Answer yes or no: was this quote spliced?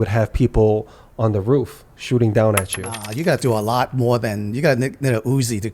yes